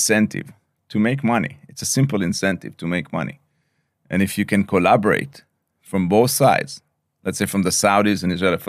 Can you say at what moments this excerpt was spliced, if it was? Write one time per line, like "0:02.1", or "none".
none